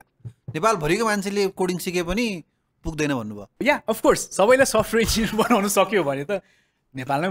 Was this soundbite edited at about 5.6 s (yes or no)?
no